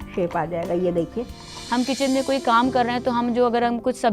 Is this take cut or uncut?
cut